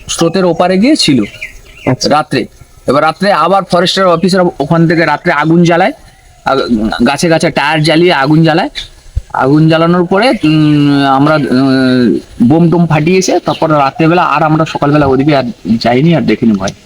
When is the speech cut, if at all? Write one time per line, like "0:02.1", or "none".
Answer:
none